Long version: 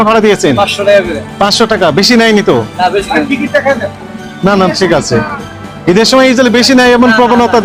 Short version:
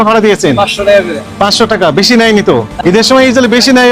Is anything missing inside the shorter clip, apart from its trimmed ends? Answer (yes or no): yes